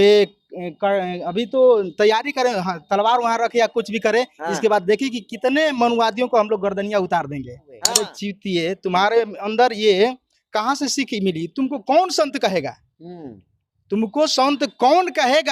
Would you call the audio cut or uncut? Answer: cut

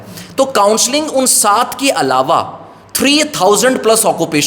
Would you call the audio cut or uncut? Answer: uncut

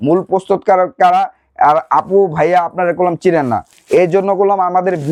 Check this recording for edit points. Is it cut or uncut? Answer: uncut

